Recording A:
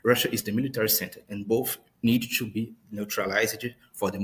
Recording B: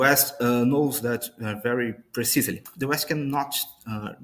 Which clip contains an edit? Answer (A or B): B